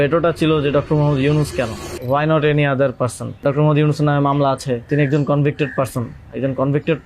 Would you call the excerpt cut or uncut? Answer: cut